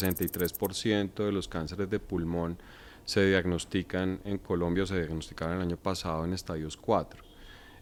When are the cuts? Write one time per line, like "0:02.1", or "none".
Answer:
none